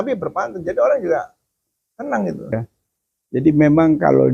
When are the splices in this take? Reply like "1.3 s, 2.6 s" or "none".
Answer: 2.6 s